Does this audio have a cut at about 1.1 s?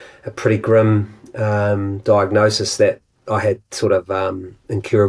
no; 0 cuts

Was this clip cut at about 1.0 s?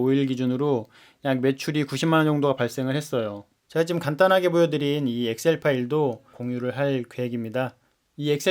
no; 2 cuts; at 3.6 s, 6.3 s

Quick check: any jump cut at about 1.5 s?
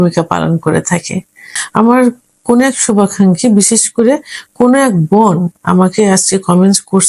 yes; 1 cut; at 1.5 s

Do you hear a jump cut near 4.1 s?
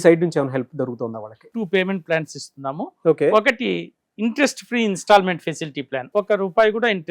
no; 2 cuts; at 1.4 s, 6.0 s

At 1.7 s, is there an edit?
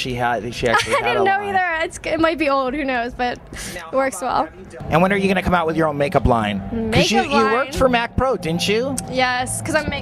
yes; 1 cut; at 1.7 s

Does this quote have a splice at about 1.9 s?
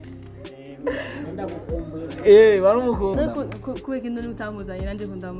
no; 1 cut; at 3.1 s

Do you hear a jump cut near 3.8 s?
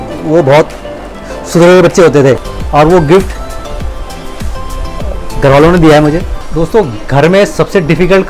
no; 2 cuts; at 2.5 s, 6.4 s

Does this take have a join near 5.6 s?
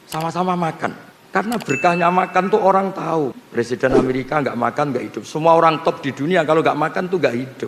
no; 2 cuts; at 1.1 s, 3.4 s

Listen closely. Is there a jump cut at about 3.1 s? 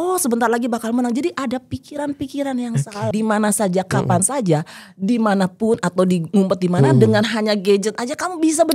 yes; 1 cut; at 3.1 s

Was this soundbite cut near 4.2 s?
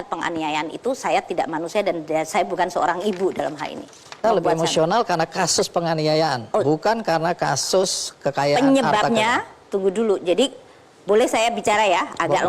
yes; 1 cut; at 4.2 s

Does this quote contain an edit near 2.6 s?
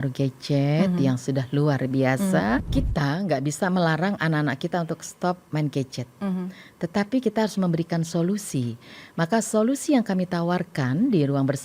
yes; 1 cut; at 2.6 s

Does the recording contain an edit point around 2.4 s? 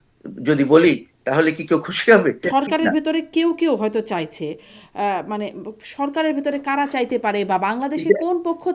yes; 1 cut; at 2.4 s

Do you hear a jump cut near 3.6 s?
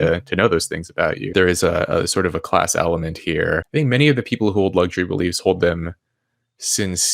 yes; 2 cuts; at 1.3 s, 3.6 s

